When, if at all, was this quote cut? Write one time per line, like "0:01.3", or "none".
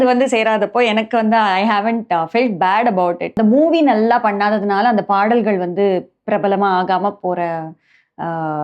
0:03.3